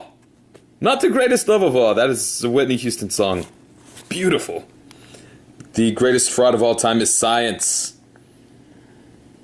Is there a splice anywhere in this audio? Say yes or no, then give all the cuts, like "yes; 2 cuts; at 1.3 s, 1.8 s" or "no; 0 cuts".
yes; 1 cut; at 8.1 s